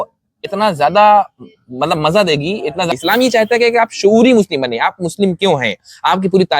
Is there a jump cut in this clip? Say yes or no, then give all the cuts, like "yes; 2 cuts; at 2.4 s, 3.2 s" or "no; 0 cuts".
yes; 1 cut; at 2.9 s